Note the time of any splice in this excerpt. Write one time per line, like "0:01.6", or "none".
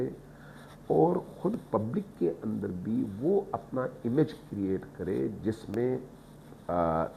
none